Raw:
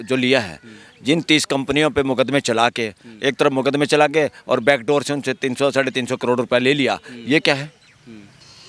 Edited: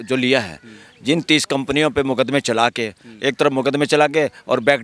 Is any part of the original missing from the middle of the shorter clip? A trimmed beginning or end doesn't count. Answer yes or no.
no